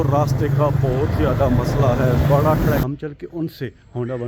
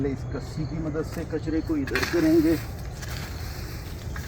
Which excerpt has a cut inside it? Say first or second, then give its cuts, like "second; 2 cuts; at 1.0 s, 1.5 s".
first; 1 cut; at 2.8 s